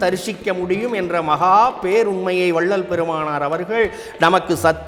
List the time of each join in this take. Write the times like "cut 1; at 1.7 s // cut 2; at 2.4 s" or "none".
none